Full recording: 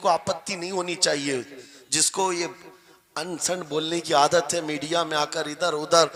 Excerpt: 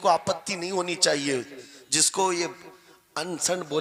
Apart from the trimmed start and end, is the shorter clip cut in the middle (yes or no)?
no